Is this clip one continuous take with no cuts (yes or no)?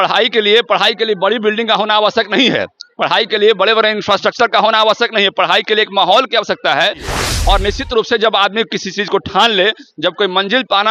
no